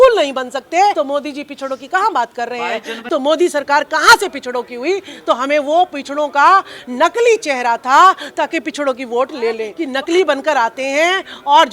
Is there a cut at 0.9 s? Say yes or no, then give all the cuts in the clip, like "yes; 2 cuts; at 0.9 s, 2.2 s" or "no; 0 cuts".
yes; 3 cuts; at 0.9 s, 3.0 s, 9.8 s